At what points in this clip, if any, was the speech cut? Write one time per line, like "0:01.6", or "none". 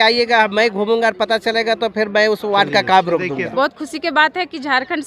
0:03.5